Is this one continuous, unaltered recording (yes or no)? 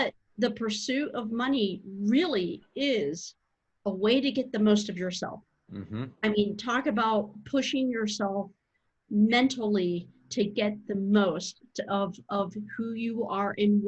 yes